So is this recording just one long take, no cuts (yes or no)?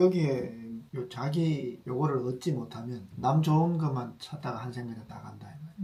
yes